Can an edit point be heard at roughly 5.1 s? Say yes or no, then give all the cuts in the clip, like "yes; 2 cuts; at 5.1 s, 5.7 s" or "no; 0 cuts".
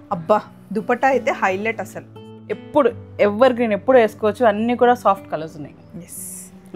no; 1 cut; at 2.2 s